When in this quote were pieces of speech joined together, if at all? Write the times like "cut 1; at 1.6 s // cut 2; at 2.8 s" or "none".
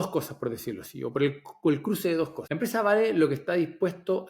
cut 1; at 2.4 s